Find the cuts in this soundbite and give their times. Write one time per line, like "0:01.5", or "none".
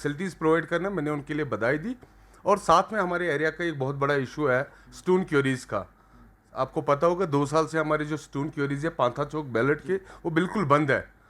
none